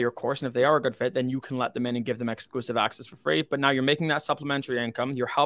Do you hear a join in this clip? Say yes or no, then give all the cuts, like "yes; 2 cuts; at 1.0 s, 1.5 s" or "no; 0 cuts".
no; 0 cuts